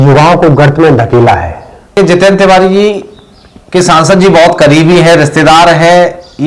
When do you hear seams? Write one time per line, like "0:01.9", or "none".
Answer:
0:01.9